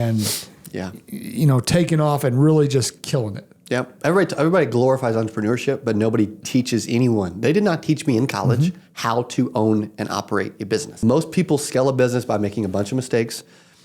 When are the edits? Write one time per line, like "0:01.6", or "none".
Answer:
0:11.0